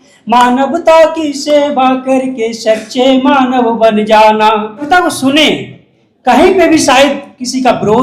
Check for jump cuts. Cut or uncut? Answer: cut